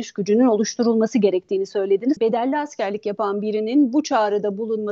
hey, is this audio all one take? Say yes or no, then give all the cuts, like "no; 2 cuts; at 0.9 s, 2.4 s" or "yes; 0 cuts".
no; 1 cut; at 2.2 s